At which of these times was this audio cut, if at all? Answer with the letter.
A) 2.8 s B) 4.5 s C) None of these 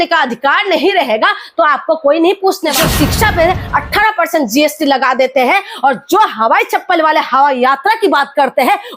A